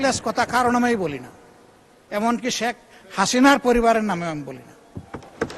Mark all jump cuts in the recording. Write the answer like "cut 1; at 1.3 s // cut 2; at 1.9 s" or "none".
none